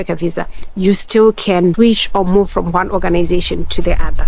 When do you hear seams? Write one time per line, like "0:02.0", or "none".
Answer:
0:01.7

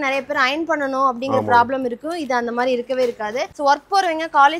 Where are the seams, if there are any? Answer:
0:03.5

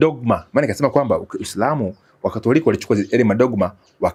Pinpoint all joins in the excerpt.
none

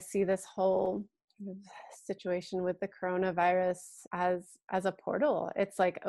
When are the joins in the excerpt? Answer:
0:01.2
0:04.0

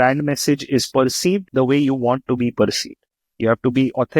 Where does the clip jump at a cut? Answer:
0:01.5
0:03.0

